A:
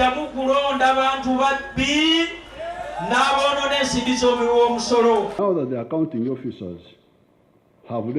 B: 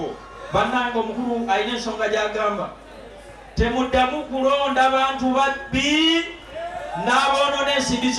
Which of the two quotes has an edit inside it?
A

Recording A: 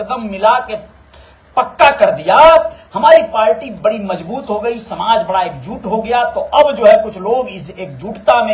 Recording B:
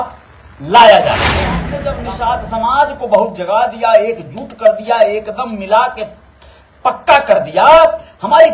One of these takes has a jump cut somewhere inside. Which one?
B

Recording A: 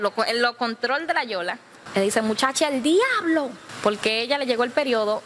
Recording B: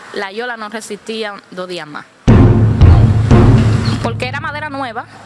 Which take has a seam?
A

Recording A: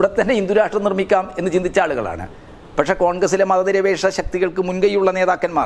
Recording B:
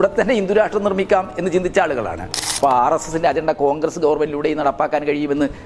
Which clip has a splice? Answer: B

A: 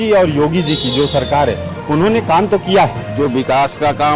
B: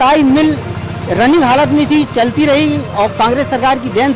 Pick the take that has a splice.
A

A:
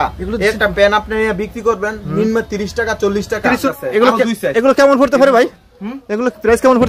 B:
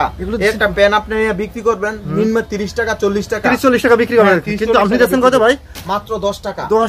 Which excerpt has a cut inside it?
A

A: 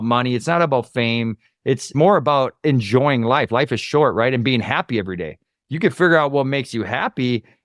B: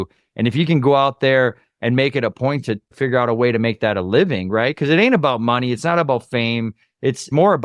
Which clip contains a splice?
B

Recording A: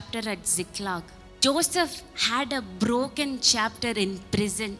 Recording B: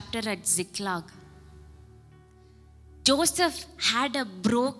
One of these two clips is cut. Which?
A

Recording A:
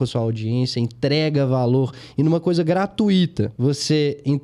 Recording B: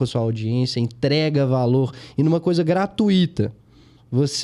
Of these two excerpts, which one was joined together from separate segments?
A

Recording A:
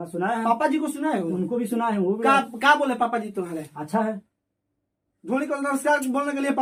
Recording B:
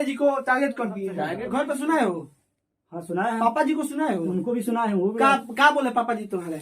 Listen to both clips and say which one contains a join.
B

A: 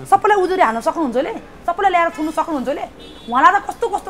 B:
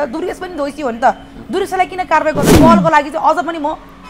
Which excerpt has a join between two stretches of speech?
B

